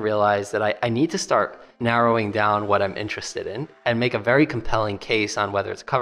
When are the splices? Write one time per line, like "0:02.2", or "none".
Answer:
0:01.7